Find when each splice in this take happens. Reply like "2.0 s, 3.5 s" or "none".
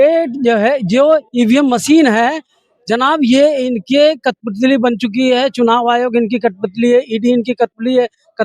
none